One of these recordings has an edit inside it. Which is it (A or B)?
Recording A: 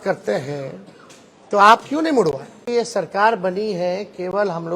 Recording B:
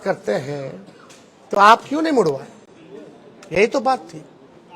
A